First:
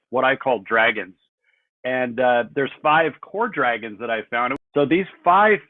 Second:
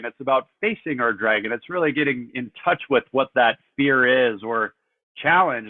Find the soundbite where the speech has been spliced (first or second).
first